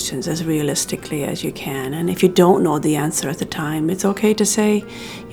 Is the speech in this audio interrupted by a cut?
no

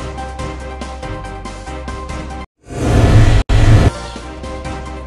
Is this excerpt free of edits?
no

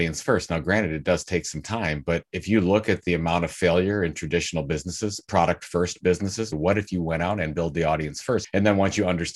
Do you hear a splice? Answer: yes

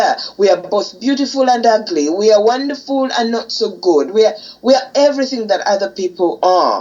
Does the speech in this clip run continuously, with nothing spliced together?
yes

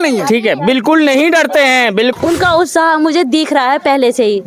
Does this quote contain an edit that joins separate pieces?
yes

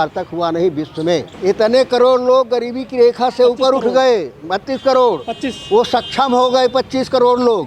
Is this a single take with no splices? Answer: no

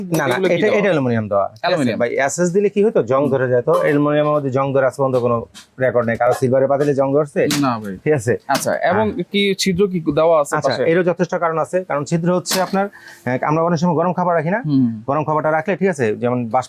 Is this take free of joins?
yes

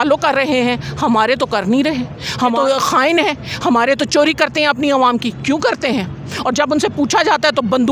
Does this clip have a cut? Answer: yes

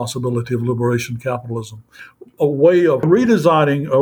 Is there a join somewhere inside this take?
yes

